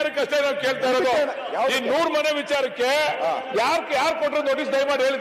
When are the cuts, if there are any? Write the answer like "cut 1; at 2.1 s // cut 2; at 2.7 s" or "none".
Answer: none